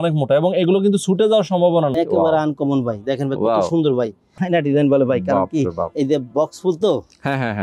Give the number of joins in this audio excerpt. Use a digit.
2